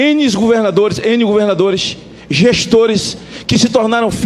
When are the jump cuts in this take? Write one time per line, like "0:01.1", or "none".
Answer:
none

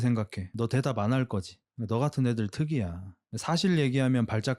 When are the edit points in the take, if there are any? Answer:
none

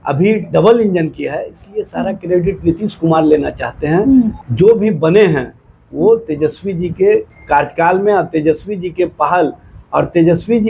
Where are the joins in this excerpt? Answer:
0:04.3

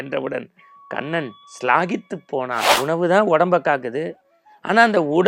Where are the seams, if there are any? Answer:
0:02.7

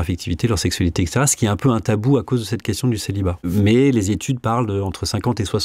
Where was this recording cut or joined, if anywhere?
0:03.4

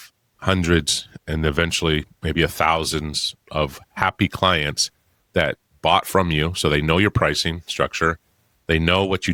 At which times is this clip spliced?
none

